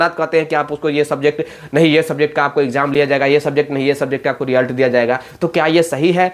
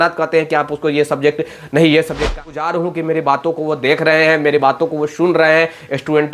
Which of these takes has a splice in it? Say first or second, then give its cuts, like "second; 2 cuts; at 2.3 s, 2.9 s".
second; 1 cut; at 2.5 s